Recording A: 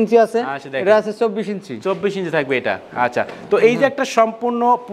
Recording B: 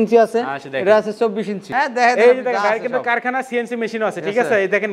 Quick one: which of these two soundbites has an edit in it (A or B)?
B